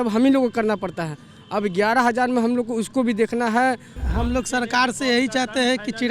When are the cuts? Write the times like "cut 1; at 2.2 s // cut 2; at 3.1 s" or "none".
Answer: cut 1; at 4.0 s